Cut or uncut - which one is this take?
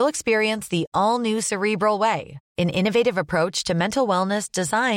uncut